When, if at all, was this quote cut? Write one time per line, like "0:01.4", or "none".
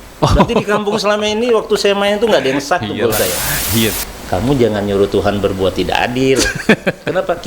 0:04.0